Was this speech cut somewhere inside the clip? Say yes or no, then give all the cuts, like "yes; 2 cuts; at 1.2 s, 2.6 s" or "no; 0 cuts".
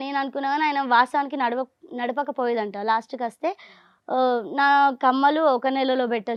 no; 0 cuts